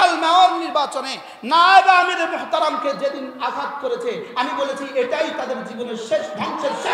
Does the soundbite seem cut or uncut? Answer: uncut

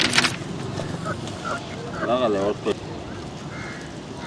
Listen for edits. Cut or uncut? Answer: cut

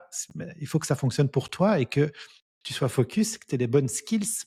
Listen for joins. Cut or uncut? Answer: uncut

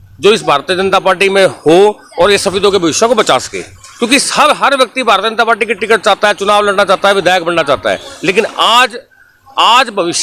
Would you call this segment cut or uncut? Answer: uncut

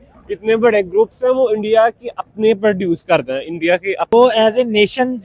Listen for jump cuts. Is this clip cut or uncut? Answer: cut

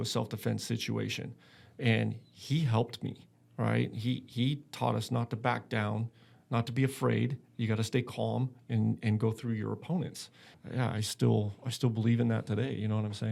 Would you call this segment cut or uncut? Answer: uncut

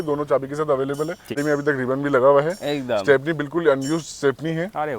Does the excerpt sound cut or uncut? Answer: cut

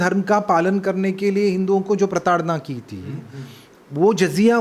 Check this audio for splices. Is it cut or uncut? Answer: uncut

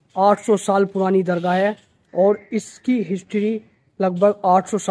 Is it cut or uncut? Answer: uncut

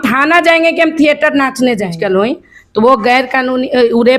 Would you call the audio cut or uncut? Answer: cut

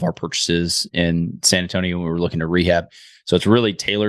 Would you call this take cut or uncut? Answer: uncut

